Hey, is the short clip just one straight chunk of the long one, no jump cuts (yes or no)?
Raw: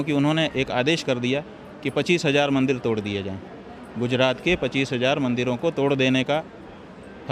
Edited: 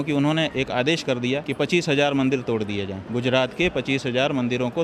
no